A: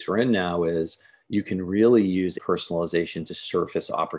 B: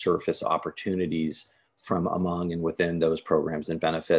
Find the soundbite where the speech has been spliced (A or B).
A